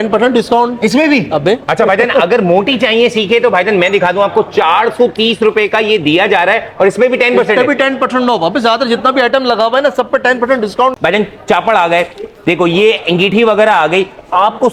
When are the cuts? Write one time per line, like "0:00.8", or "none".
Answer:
none

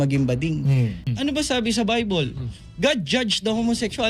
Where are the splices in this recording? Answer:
none

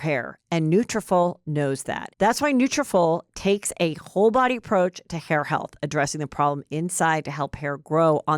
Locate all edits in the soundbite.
0:02.0

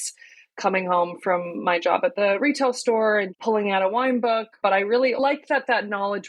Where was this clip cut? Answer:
0:03.3
0:04.5

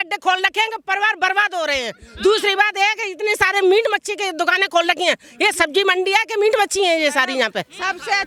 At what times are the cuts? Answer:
none

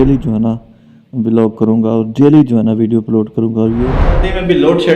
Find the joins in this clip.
0:03.9

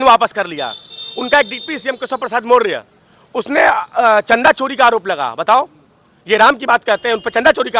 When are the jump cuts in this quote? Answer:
none

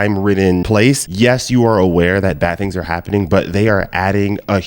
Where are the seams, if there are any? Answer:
0:00.9

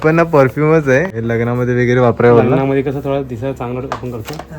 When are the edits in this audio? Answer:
0:01.1

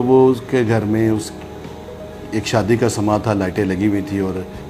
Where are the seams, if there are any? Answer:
none

